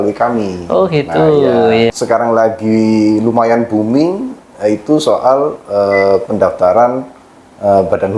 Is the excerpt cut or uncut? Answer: cut